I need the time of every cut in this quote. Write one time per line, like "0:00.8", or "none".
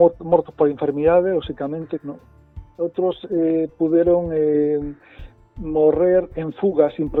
none